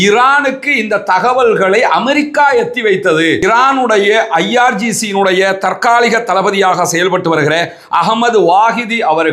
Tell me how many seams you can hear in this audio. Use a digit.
1